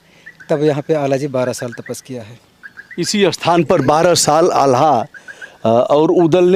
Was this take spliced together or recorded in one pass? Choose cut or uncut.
uncut